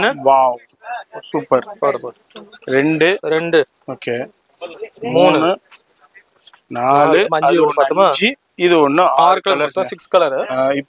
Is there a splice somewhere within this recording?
no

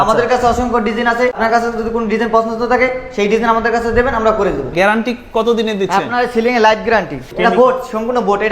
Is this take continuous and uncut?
no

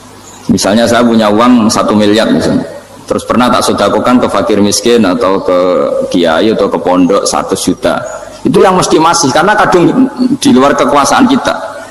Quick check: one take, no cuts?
yes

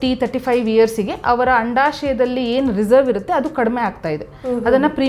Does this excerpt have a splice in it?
no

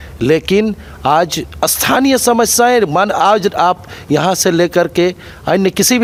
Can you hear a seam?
no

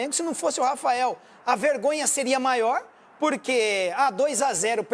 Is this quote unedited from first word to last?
yes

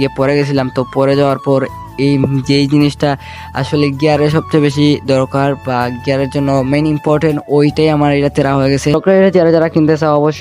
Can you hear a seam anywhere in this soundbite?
yes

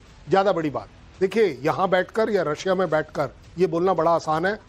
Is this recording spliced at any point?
no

